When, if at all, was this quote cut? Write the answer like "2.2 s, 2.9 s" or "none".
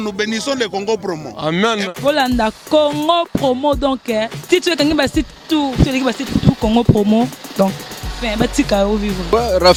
none